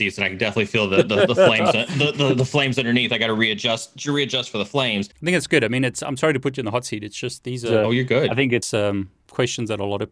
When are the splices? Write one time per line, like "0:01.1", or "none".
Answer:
0:05.1